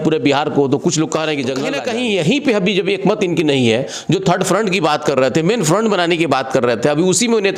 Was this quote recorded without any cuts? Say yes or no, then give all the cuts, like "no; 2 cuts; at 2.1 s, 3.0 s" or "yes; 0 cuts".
no; 1 cut; at 1.7 s